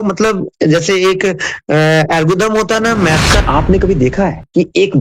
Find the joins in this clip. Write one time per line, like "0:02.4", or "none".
0:03.4